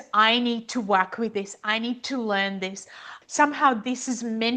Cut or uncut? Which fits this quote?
cut